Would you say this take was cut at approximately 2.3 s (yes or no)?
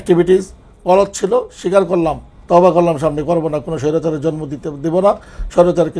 yes